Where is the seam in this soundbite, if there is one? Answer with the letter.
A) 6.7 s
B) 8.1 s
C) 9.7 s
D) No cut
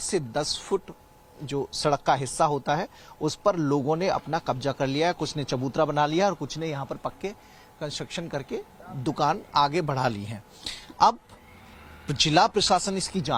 D